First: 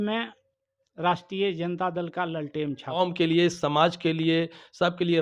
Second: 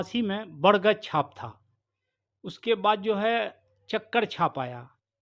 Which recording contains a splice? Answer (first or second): first